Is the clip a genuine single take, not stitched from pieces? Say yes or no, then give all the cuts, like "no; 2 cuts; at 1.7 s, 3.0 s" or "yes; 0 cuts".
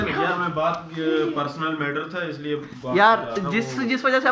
no; 1 cut; at 3.0 s